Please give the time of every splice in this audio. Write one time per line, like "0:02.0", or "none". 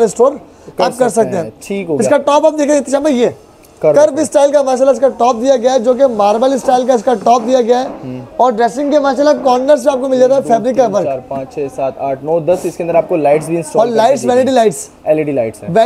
none

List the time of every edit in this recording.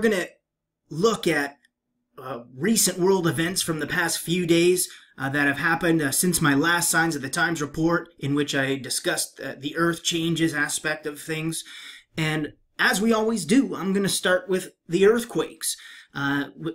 0:06.8

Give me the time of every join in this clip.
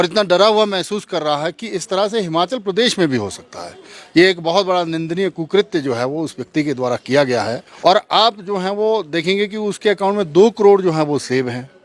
0:07.6

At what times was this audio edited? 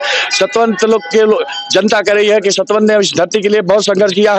none

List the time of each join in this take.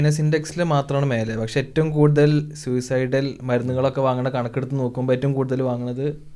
none

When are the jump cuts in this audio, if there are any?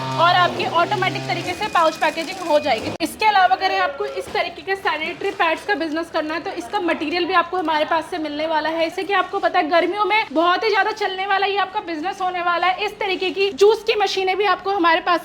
0:02.9
0:08.9
0:10.3
0:13.5

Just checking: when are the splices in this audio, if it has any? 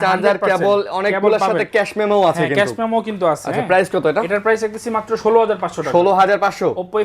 none

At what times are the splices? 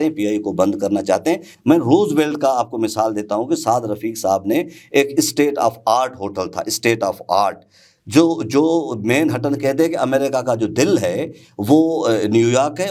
none

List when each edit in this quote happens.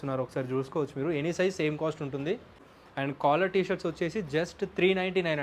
0:02.6

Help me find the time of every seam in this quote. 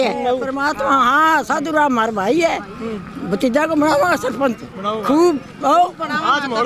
none

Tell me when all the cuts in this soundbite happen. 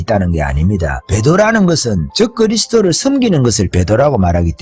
0:01.1
0:02.0

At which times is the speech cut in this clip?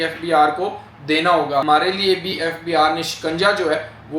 0:01.6

